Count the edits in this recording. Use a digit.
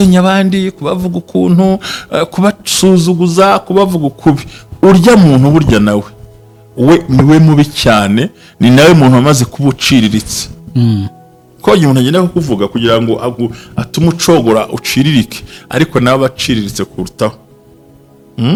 0